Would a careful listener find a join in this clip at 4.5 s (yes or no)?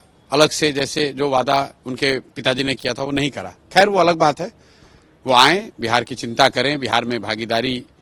no